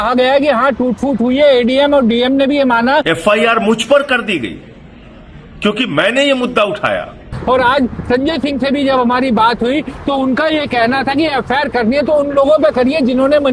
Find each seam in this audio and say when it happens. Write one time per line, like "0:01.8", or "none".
0:03.0
0:07.3